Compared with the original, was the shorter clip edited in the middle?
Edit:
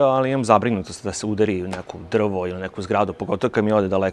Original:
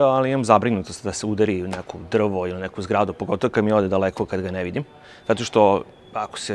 no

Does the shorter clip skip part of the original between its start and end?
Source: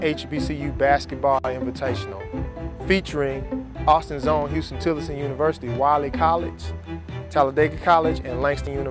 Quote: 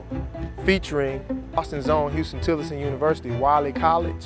yes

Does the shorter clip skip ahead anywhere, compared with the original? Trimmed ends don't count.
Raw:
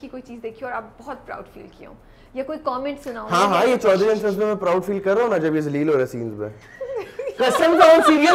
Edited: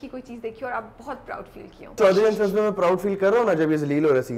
yes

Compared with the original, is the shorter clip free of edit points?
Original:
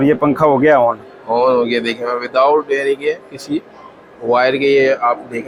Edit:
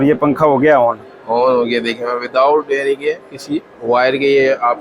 no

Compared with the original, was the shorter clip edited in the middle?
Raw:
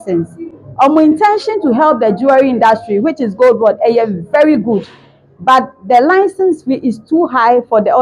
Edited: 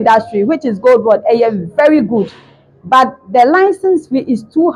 no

